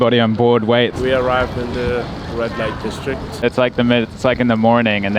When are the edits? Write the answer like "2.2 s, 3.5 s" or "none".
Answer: 0.9 s